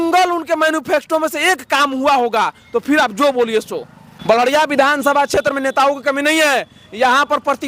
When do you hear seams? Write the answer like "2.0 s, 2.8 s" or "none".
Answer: none